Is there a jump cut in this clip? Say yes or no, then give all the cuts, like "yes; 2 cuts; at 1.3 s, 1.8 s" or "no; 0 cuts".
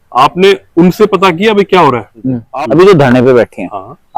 yes; 1 cut; at 2.4 s